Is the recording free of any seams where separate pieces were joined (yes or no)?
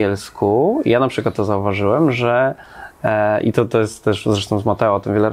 yes